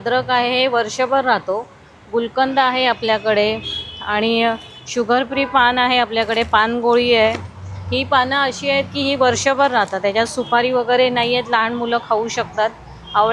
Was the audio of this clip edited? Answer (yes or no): no